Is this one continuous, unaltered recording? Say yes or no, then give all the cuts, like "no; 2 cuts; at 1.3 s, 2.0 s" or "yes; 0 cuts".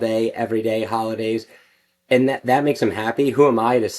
yes; 0 cuts